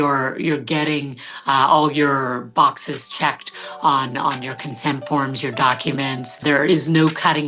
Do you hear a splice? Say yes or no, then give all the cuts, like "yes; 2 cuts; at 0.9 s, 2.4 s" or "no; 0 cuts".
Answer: yes; 1 cut; at 6.4 s